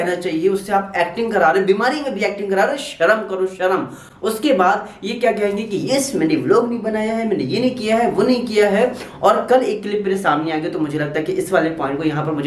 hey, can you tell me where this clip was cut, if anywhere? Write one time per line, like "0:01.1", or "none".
none